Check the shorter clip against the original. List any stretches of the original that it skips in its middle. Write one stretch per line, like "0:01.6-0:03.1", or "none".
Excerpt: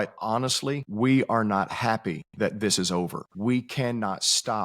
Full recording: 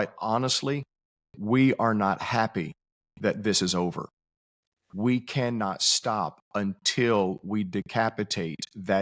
0:00.9-0:01.4
0:02.8-0:03.1
0:04.1-0:04.8